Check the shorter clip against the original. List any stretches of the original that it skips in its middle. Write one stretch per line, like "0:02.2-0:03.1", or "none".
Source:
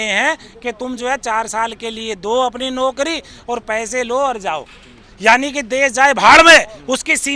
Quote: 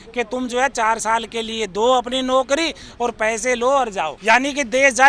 0:04.6-0:05.1